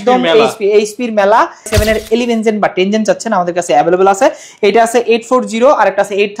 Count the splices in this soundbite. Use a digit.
1